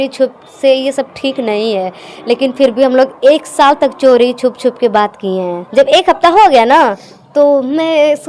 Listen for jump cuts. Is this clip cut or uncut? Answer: cut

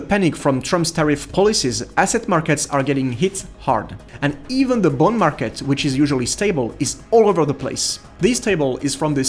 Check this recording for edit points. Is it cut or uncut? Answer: uncut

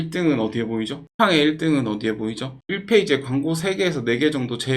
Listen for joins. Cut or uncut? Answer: cut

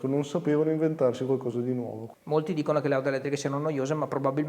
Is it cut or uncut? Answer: cut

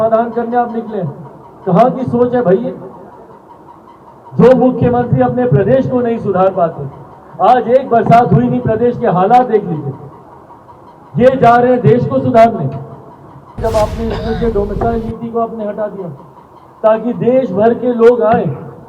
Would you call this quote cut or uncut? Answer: cut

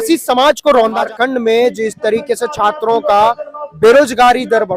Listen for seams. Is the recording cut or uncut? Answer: cut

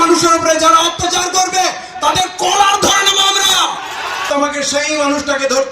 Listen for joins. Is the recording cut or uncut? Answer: cut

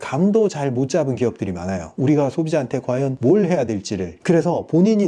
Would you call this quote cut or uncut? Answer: cut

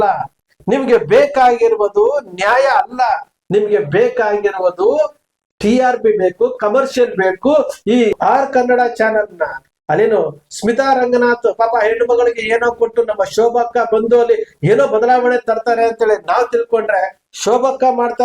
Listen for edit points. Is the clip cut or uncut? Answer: cut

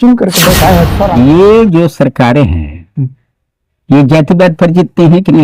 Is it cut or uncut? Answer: cut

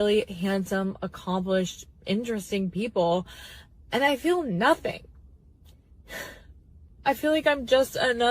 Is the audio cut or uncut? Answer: cut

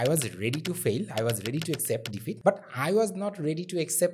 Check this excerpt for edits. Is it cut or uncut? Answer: cut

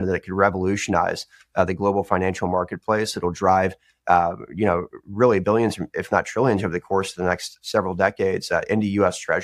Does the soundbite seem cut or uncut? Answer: uncut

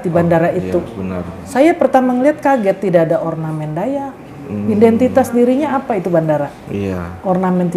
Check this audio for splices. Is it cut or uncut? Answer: uncut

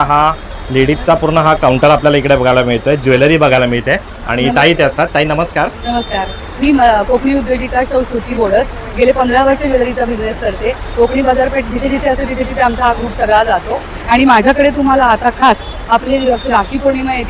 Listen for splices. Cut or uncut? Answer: uncut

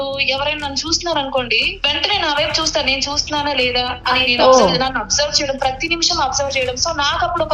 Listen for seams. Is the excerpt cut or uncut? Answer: cut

